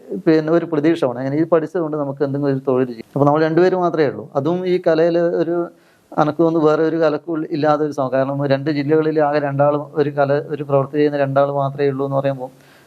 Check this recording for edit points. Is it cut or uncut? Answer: cut